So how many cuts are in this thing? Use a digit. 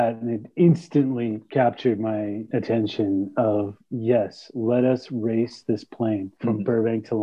1